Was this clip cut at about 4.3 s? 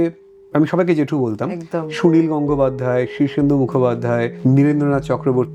yes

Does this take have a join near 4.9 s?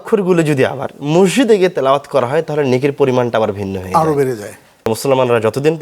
yes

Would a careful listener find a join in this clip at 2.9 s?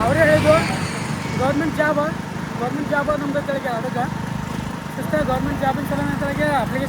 no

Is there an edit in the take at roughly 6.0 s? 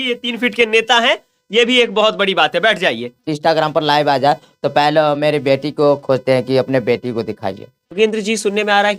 no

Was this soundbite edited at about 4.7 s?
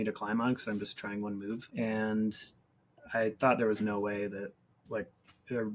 yes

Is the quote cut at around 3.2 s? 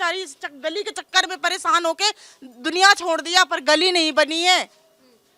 no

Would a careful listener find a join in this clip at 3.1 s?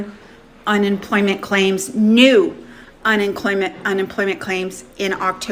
no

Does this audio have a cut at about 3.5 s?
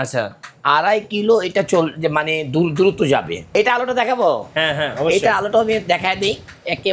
yes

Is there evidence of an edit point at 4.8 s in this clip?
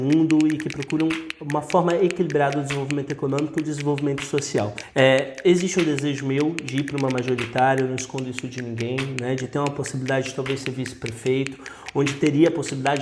yes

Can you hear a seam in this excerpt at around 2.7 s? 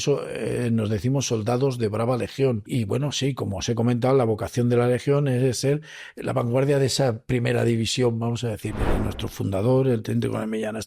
yes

